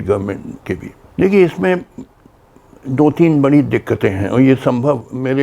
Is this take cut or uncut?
cut